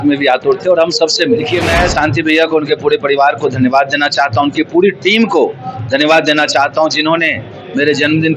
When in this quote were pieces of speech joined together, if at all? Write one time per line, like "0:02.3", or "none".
0:01.5